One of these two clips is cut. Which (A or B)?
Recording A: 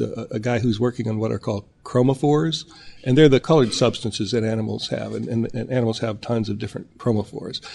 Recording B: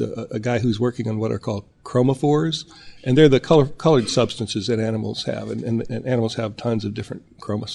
A